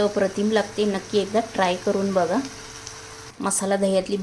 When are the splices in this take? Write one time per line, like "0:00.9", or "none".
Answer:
0:03.2